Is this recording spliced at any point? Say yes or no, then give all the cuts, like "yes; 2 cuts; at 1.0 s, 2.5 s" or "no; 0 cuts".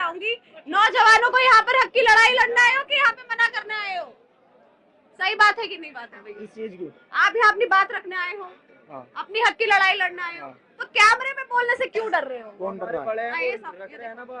no; 0 cuts